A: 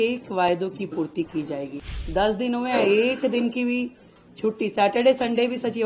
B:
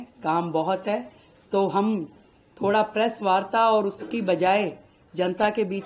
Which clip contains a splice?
A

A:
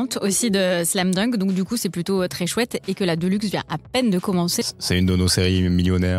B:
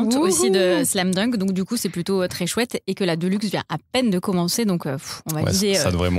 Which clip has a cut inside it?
A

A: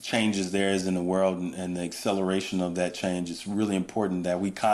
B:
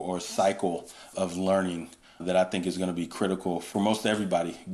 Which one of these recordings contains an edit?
B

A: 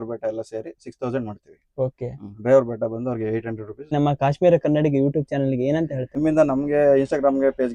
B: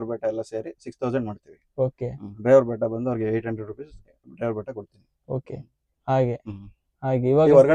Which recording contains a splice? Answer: A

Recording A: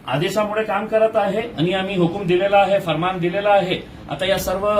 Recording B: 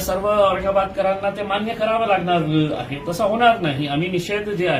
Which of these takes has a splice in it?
A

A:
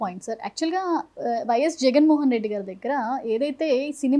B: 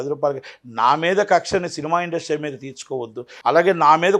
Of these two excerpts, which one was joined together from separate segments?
B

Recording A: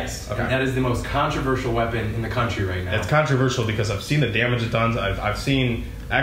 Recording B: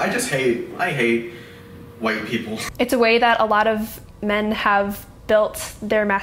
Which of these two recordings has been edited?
B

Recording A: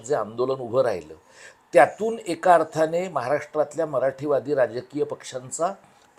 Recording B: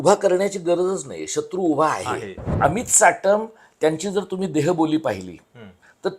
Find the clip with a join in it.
B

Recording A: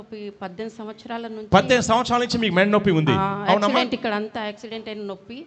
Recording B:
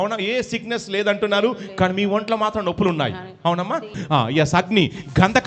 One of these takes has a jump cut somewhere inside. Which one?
B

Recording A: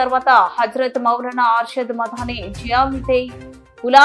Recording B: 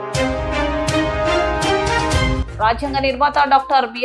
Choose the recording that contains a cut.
B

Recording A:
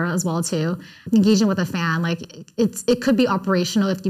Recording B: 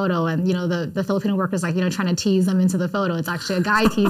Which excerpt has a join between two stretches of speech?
A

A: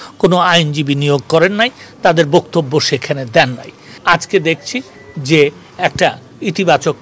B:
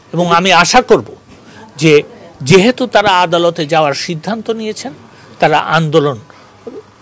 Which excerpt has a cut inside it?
A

